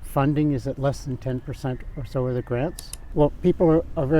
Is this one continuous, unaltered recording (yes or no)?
no